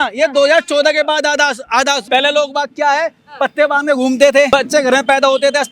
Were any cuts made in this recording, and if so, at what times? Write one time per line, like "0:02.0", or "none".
0:02.0
0:04.5